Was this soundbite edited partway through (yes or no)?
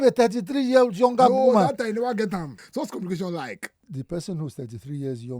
yes